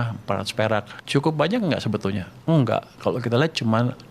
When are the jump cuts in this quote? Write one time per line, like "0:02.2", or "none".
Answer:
0:01.0